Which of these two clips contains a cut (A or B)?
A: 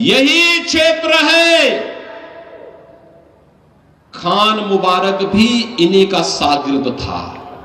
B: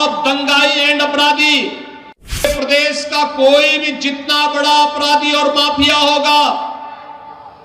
B